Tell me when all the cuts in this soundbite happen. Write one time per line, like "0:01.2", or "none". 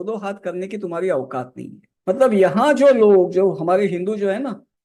none

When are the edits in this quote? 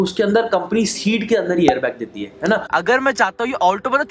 0:02.6

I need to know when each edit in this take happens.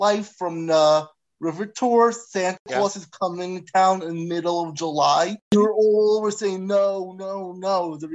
0:05.5

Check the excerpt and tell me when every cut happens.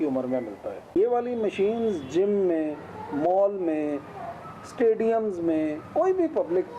0:00.9

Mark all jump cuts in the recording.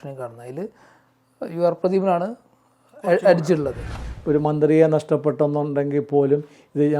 0:04.1

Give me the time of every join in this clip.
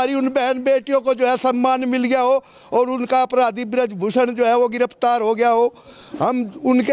none

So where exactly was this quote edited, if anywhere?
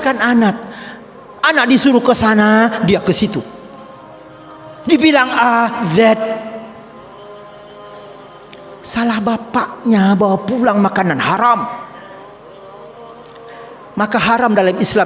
0:06.8
0:08.3

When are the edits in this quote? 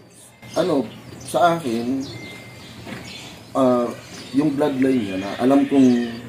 none

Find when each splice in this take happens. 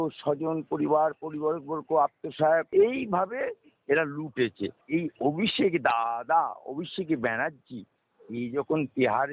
0:02.7
0:04.8

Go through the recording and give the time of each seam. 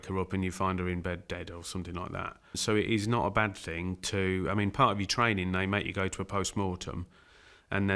0:02.6

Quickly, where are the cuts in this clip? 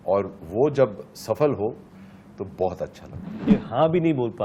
0:03.5

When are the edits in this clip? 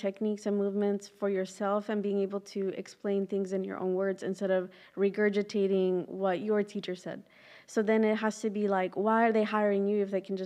none

